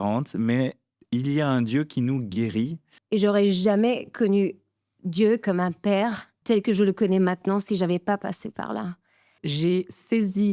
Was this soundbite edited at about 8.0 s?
no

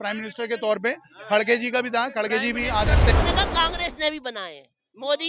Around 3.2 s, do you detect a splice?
yes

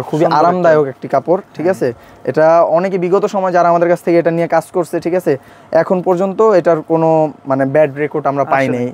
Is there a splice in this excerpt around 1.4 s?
no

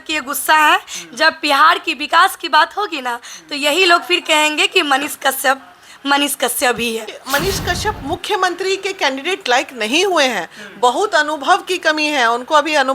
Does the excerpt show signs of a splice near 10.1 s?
no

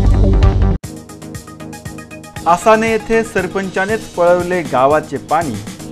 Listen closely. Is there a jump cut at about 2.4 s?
no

